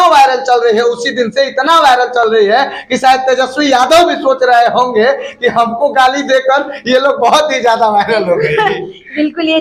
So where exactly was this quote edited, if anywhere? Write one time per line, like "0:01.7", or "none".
none